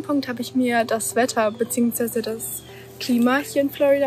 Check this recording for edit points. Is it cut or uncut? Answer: uncut